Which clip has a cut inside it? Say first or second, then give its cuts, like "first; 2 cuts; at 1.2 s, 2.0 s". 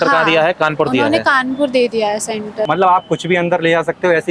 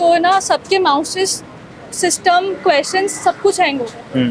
first; 1 cut; at 2.6 s